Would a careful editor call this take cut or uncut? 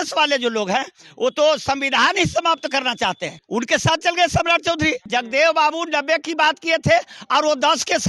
cut